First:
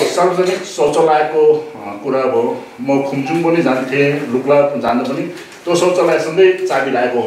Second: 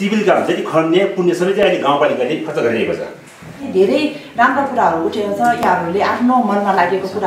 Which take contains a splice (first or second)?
second